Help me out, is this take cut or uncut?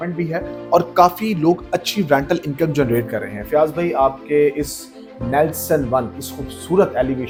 uncut